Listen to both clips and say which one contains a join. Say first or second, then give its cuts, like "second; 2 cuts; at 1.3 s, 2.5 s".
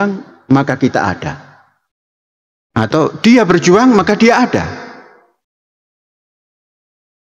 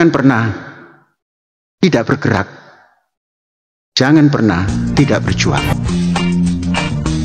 second; 1 cut; at 5.6 s